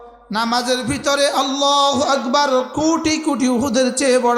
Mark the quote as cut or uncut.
uncut